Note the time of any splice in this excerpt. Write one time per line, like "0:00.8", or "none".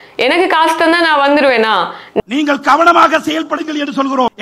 0:02.2

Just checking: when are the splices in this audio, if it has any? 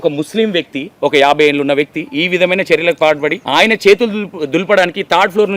0:03.4

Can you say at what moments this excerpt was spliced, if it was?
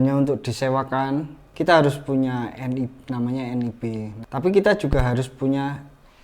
0:01.4
0:04.1

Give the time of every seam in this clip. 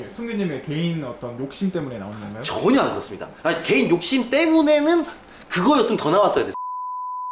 none

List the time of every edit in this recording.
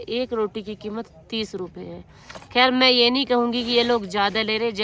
none

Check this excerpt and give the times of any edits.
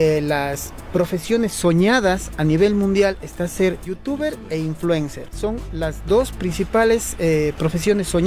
0:03.9
0:05.2

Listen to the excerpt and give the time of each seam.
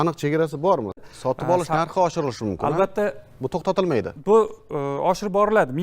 0:01.0

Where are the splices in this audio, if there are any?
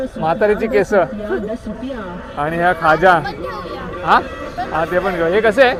none

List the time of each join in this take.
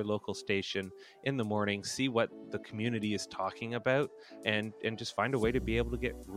0:02.4

